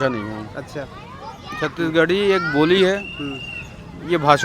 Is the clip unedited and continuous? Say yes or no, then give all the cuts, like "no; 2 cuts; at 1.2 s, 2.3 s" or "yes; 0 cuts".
yes; 0 cuts